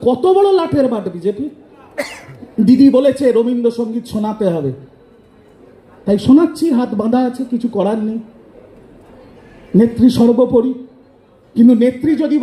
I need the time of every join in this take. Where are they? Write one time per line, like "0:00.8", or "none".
none